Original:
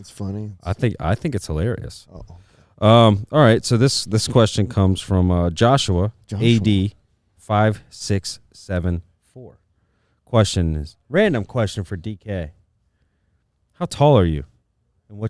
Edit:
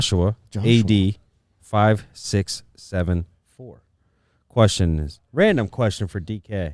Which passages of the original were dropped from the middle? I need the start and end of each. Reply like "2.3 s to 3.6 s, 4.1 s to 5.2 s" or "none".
none